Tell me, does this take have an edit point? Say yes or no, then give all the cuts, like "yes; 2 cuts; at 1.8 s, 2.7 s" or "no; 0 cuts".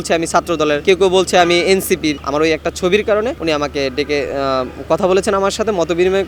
yes; 3 cuts; at 0.8 s, 2.2 s, 3.4 s